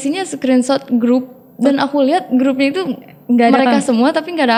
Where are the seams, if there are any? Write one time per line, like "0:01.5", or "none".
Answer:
none